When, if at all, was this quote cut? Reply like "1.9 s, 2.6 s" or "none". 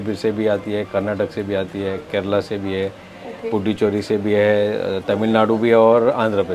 none